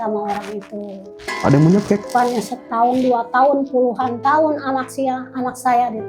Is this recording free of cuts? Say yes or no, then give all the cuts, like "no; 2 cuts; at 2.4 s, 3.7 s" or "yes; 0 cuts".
no; 1 cut; at 2.1 s